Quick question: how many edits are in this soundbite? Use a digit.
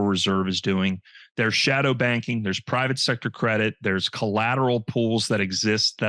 0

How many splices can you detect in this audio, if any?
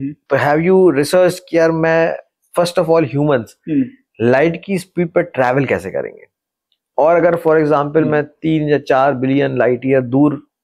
0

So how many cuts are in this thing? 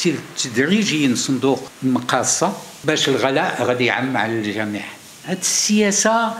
3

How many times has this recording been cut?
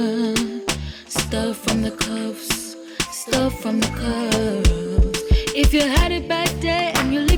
0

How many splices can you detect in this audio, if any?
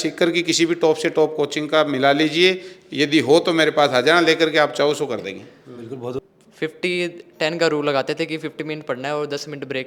1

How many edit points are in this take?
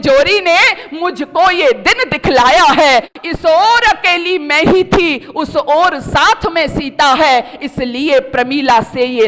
1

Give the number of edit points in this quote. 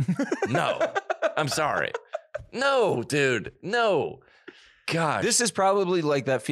0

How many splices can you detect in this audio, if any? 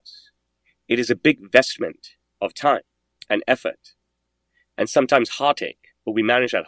0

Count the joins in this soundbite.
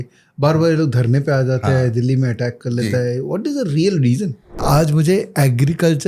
1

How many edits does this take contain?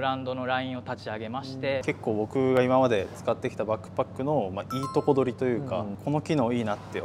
2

